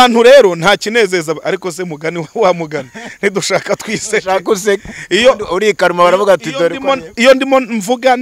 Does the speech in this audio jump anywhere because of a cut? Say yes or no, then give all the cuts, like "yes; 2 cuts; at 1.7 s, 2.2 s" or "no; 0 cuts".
no; 0 cuts